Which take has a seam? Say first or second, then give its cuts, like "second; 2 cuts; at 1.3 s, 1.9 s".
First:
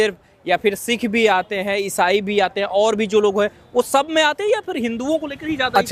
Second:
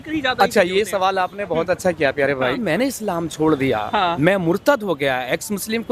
second; 2 cuts; at 2.6 s, 4.2 s